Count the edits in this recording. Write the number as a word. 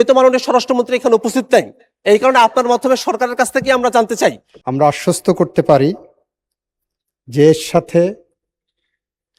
one